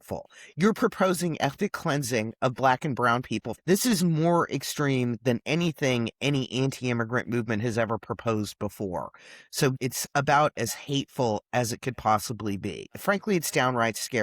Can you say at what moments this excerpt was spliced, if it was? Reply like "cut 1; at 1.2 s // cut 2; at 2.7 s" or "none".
cut 1; at 3.5 s // cut 2; at 9.8 s // cut 3; at 12.9 s